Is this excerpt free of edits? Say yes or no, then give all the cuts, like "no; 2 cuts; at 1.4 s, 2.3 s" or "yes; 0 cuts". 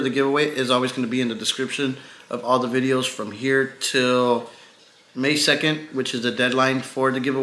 yes; 0 cuts